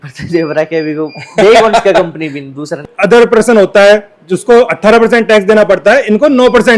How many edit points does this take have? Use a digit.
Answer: 1